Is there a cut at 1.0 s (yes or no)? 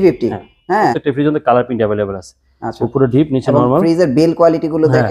yes